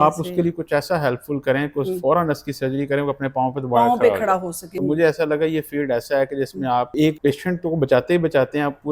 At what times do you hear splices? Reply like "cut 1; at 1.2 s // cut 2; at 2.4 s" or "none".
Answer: cut 1; at 4.6 s // cut 2; at 7.0 s